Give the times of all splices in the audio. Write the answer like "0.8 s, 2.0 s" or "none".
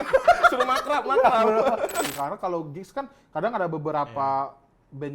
2.1 s